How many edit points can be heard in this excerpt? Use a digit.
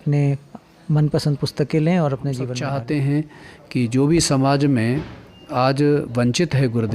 1